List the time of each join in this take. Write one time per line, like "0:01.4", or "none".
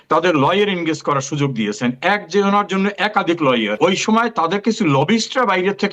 0:03.8